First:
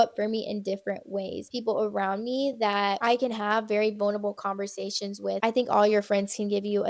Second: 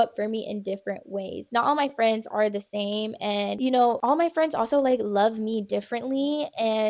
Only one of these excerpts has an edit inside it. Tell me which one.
first; 2 cuts; at 1.5 s, 5.4 s

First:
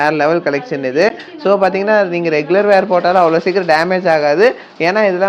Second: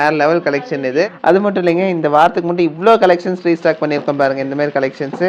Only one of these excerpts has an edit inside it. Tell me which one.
second; 1 cut; at 1.2 s

